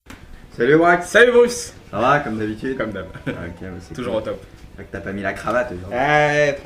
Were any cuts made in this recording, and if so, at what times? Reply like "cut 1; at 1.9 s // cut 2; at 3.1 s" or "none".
cut 1; at 3.6 s